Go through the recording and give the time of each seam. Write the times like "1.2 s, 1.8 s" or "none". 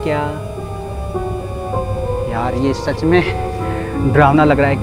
none